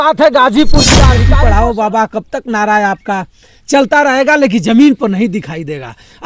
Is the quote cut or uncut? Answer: cut